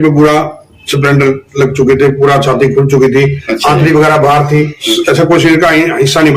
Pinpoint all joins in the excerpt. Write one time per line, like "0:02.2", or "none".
0:04.8